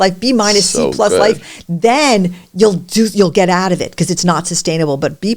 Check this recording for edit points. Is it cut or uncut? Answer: uncut